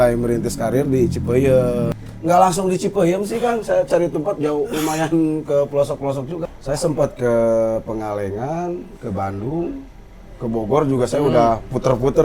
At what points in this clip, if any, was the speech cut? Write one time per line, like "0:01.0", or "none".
0:02.0
0:06.4